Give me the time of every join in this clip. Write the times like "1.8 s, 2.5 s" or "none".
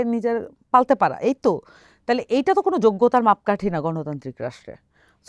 none